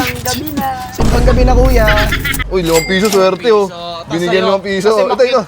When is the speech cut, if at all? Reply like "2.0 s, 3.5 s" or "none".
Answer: 2.3 s